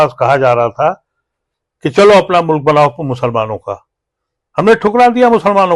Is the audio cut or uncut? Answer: uncut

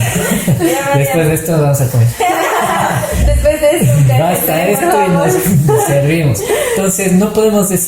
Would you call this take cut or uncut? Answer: uncut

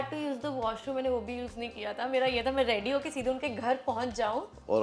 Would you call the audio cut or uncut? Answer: uncut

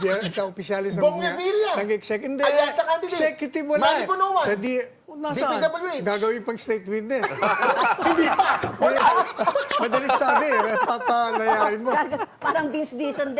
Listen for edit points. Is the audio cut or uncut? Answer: uncut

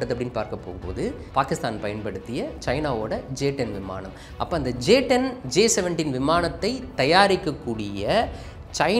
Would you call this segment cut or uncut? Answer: cut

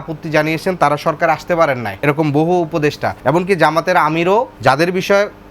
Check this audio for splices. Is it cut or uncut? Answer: cut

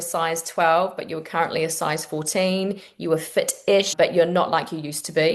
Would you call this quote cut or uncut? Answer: cut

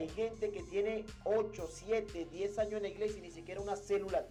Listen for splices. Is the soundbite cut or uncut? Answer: uncut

